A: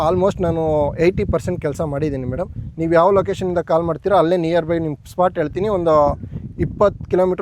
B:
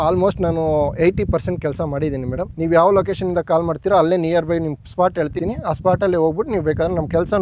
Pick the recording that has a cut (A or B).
B